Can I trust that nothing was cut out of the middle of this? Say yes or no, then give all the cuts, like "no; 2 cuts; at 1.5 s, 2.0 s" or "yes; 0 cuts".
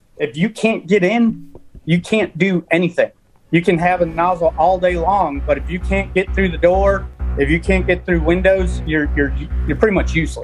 yes; 0 cuts